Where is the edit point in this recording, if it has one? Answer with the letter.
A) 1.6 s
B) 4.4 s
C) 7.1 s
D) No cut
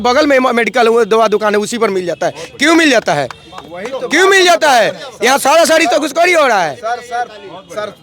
D